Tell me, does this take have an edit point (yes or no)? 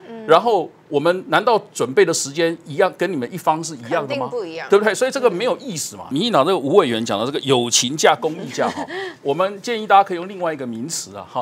yes